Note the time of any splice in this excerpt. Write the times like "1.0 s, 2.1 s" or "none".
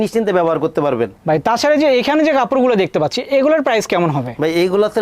1.1 s